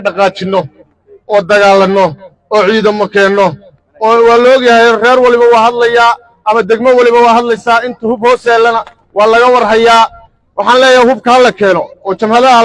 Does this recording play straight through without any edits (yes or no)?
yes